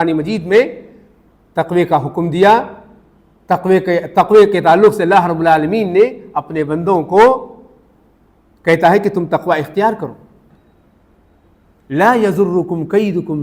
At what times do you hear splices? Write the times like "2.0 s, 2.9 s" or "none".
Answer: 10.5 s